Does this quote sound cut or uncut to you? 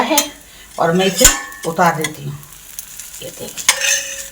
cut